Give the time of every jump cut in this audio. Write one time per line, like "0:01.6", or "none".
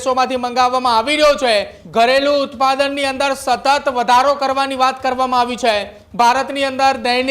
0:01.8
0:06.0